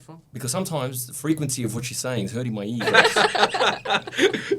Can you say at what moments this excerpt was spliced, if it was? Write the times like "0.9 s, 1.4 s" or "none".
2.9 s